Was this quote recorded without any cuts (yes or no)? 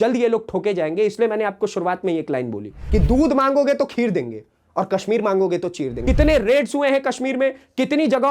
no